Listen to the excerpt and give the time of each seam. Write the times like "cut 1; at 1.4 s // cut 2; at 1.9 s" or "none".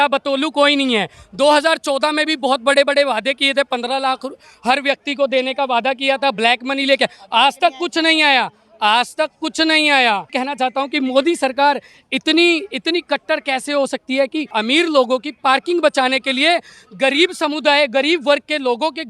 cut 1; at 10.3 s // cut 2; at 14.5 s